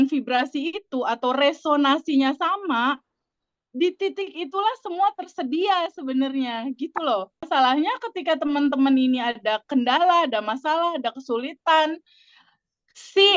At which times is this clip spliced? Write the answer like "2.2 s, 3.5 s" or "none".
7.5 s